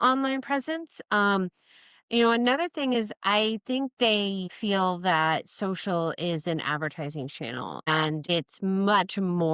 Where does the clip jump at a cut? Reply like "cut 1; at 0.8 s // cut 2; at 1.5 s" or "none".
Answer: cut 1; at 4.5 s // cut 2; at 7.9 s